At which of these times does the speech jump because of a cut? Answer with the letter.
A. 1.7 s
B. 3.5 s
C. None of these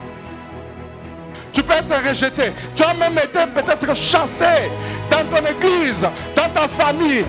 C